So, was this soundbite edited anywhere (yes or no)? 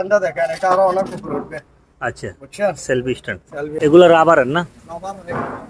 yes